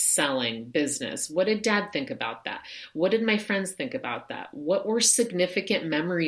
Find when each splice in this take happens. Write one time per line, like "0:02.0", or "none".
none